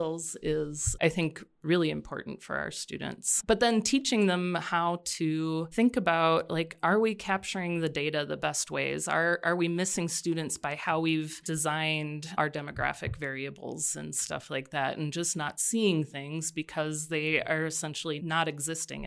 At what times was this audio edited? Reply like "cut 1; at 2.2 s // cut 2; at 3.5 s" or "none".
cut 1; at 5.7 s // cut 2; at 8.4 s // cut 3; at 12.3 s // cut 4; at 18.2 s